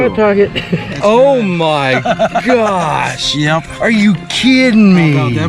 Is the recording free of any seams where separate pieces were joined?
no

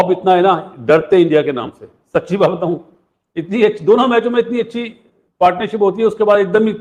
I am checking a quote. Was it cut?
no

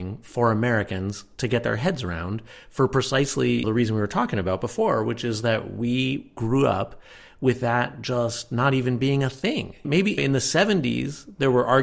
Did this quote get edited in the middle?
no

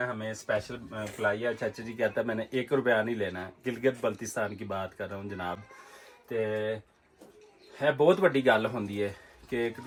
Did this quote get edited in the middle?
no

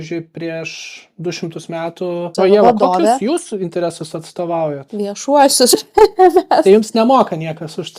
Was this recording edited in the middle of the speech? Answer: yes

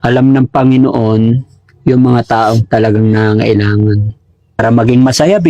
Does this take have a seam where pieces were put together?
yes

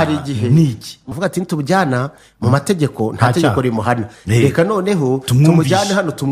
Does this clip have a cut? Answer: yes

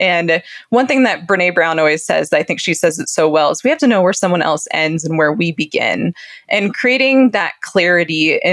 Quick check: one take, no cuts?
yes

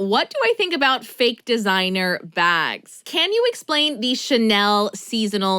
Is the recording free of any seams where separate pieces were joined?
no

